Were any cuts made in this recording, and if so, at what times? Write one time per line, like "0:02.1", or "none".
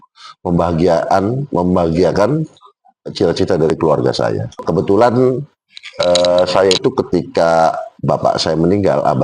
0:04.5